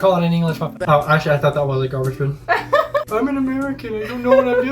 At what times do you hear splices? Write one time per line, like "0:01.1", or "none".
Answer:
0:00.8
0:03.1